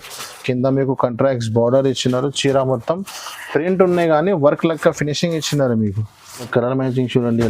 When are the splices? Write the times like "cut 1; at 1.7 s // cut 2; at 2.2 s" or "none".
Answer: cut 1; at 6.5 s